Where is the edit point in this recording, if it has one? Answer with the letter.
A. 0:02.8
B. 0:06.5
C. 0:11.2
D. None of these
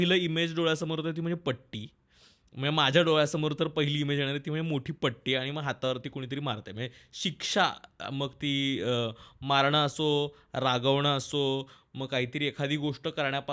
D